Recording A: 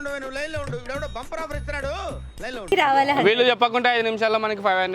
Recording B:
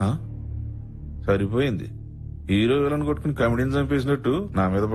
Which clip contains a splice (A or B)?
A